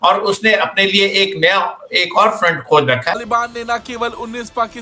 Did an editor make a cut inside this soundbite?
yes; 1 cut; at 3.2 s

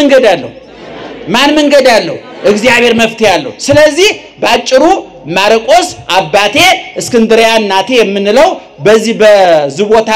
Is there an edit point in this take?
no; 0 cuts

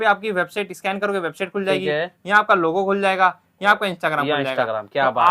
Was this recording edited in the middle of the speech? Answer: no; 0 cuts

